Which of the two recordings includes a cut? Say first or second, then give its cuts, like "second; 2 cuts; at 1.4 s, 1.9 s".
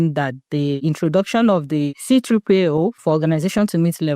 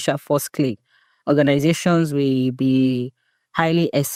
first; 3 cuts; at 0.8 s, 2.0 s, 3.0 s